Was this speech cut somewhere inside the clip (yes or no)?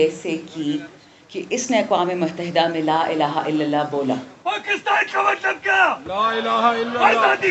no